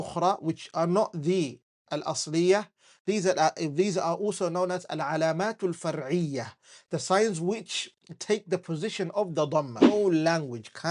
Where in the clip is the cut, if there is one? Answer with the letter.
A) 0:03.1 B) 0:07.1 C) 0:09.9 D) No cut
C